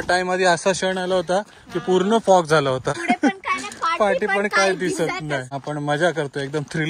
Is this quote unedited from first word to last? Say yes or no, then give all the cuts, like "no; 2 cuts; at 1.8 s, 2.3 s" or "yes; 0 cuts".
no; 2 cuts; at 3.0 s, 5.5 s